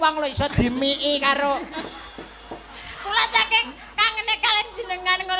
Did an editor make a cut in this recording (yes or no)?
no